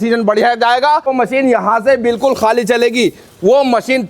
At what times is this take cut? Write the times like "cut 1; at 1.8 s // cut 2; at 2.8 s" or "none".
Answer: cut 1; at 1.1 s